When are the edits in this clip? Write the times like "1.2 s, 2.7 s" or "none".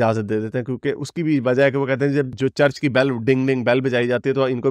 none